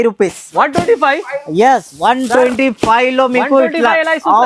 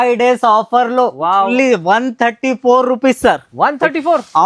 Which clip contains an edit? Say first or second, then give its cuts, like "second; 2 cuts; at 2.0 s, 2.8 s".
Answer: second; 1 cut; at 1.5 s